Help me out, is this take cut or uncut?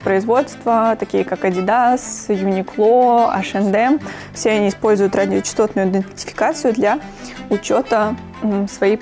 uncut